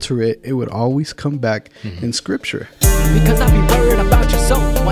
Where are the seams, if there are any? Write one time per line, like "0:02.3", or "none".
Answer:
0:02.7